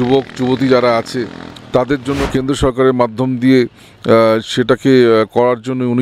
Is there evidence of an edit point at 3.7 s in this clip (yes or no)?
no